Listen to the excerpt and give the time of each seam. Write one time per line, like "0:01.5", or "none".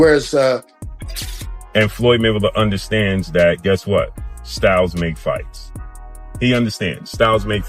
0:01.2